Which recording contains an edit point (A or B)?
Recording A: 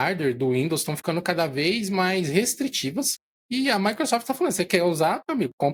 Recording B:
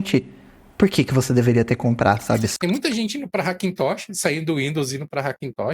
B